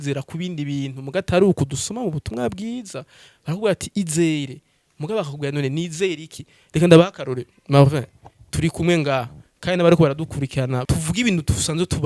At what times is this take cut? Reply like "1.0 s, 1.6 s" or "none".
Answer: 10.8 s